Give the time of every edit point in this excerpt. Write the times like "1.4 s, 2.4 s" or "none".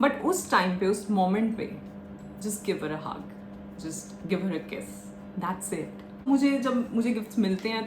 6.3 s